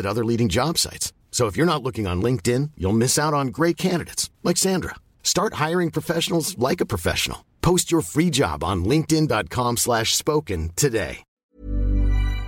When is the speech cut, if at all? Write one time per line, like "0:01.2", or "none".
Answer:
0:11.4